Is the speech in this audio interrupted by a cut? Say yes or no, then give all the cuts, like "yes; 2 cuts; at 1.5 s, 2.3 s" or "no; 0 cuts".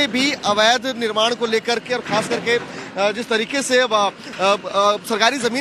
no; 0 cuts